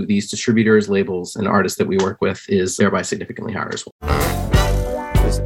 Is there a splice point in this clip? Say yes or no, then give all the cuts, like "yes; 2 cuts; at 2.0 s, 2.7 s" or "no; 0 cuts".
yes; 2 cuts; at 2.7 s, 3.9 s